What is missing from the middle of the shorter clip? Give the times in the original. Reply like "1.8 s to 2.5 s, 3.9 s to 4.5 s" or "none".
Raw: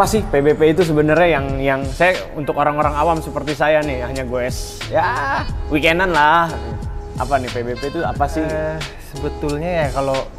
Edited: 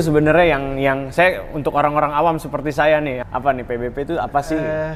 4.0 s to 7.1 s